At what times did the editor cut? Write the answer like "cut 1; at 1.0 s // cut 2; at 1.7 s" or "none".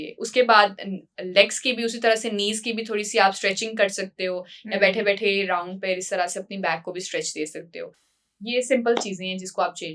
none